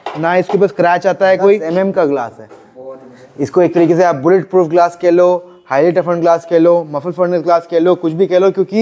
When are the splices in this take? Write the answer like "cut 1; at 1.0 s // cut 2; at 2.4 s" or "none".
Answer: cut 1; at 1.7 s